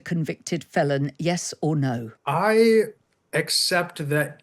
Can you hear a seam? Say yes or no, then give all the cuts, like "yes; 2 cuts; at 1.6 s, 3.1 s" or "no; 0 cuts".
yes; 1 cut; at 2.1 s